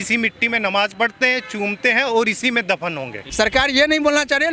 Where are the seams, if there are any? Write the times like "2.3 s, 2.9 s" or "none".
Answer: 3.2 s

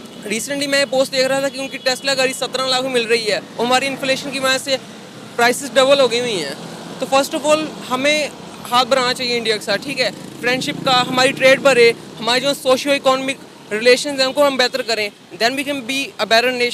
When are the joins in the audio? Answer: none

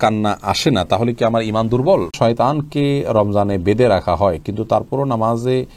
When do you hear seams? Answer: 2.1 s

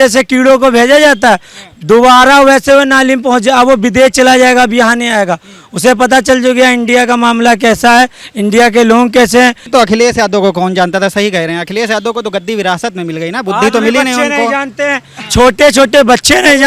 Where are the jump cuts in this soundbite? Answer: 9.6 s

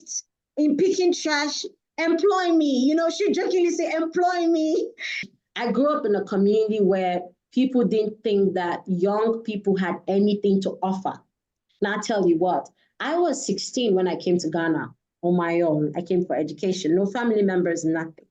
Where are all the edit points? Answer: 5.3 s

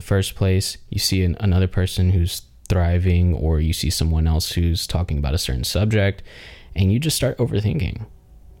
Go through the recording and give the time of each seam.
none

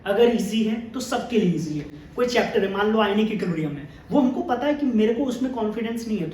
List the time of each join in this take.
2.0 s

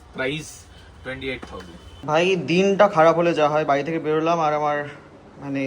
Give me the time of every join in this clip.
2.0 s

